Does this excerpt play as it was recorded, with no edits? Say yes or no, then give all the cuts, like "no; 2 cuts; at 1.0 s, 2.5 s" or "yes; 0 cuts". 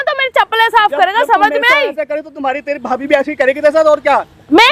yes; 0 cuts